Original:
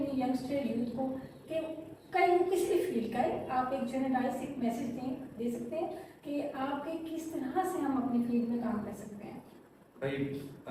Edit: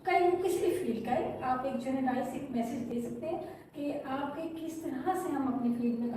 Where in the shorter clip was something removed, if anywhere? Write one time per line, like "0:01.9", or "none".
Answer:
0:02.9